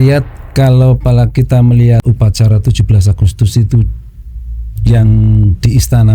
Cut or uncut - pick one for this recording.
cut